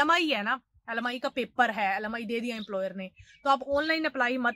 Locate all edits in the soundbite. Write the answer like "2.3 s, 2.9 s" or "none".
none